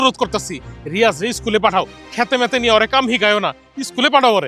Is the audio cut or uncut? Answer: uncut